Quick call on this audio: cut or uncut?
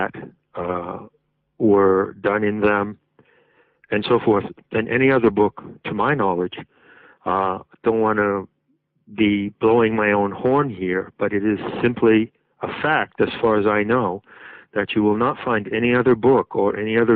uncut